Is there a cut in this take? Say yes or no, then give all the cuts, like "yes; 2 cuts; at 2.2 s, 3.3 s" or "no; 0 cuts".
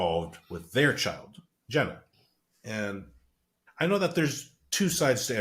no; 0 cuts